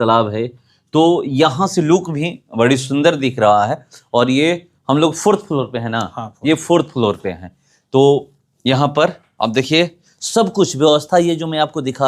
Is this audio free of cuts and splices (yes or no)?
yes